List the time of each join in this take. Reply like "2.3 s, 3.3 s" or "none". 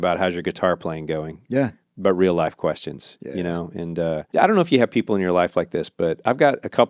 4.3 s